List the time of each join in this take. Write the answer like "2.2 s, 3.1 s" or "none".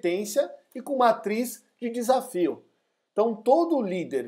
none